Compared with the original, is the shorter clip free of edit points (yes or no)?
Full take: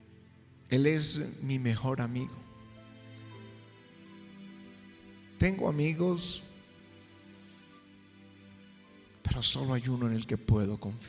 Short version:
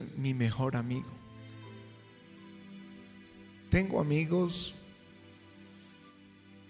no